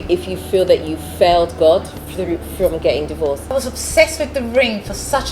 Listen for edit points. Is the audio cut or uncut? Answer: cut